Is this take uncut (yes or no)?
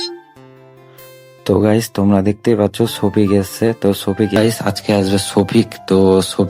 no